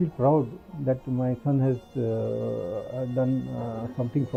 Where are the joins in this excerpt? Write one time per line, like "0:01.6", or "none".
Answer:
none